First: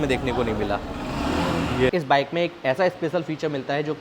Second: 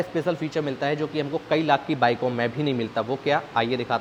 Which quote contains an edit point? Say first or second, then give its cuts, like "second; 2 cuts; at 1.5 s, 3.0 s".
first; 1 cut; at 1.9 s